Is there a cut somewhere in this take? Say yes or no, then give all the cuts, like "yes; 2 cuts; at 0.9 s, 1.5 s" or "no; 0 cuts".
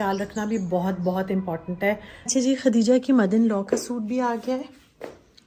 yes; 1 cut; at 2.3 s